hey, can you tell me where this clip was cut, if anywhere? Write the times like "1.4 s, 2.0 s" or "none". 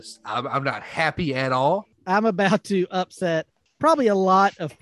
1.9 s, 3.6 s

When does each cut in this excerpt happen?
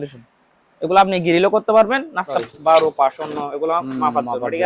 2.4 s

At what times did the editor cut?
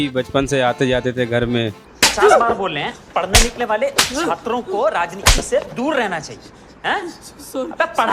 1.8 s

